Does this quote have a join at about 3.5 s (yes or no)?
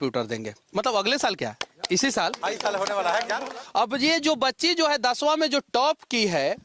yes